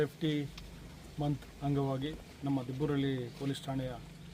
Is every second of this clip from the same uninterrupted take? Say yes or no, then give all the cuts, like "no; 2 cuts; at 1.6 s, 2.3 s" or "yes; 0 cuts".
yes; 0 cuts